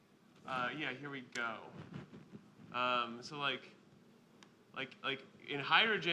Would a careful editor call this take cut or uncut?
cut